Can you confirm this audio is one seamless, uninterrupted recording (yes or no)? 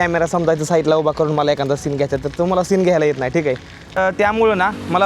no